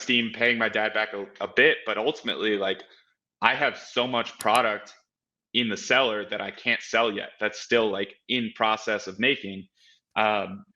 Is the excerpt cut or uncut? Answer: uncut